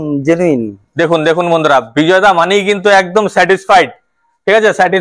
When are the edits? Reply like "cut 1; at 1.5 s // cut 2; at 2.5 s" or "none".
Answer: none